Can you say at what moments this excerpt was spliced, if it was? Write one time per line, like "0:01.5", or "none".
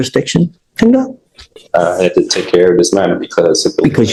none